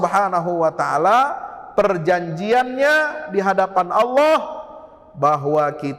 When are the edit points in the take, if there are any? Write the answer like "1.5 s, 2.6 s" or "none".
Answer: none